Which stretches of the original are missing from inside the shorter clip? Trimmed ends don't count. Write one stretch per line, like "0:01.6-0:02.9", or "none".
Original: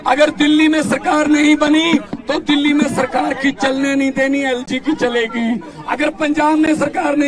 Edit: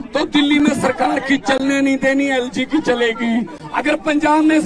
none

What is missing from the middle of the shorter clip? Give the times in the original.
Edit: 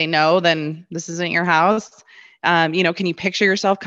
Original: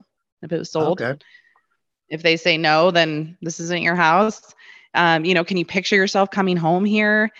none

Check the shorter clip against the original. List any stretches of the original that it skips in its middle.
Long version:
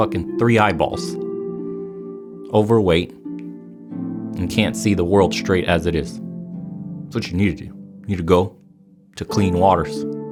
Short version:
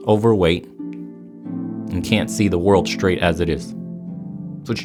none

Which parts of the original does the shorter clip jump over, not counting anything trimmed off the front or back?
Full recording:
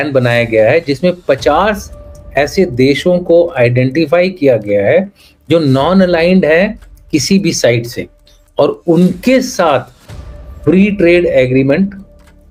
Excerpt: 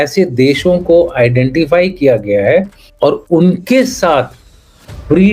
0:05.2-0:08.4

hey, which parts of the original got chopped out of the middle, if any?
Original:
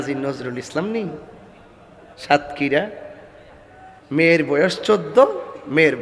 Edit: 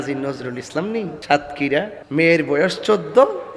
0:01.2-0:02.2
0:03.0-0:04.0

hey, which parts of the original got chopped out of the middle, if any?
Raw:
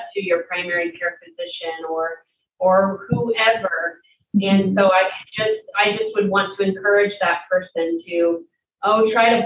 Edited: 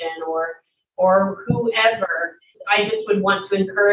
0:04.2-0:05.7

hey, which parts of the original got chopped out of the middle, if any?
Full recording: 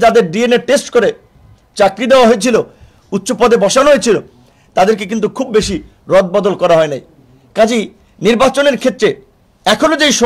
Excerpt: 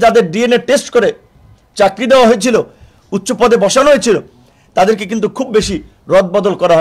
none

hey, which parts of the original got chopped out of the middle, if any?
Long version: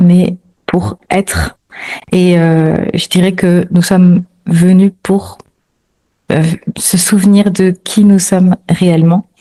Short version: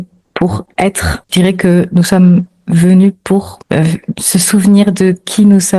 0:01.6-0:03.0
0:05.3-0:06.1

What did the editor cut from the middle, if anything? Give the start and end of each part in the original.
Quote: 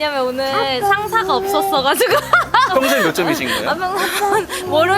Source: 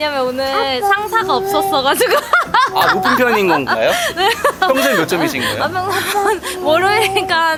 0:02.7-0:04.6

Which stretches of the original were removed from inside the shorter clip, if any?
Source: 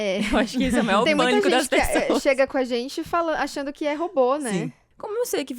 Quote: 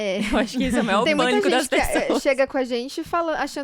none

